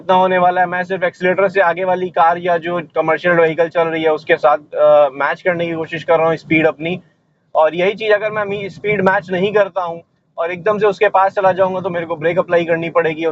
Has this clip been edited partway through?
no; 0 cuts

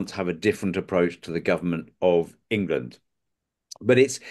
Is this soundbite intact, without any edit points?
yes; 0 cuts

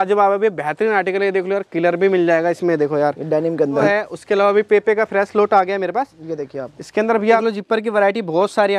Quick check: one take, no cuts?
no; 2 cuts; at 3.9 s, 7.4 s

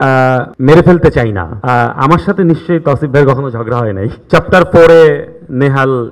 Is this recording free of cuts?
no; 2 cuts; at 1.6 s, 4.2 s

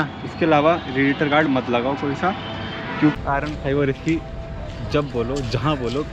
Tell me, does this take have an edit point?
yes; 1 cut; at 3.1 s

